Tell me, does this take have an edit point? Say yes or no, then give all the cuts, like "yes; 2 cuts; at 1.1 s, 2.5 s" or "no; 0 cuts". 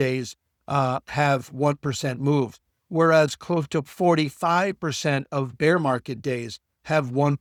no; 0 cuts